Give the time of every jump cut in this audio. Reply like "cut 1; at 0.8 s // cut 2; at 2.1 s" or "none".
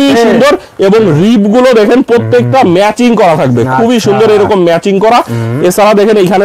none